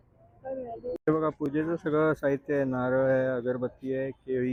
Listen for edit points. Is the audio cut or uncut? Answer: uncut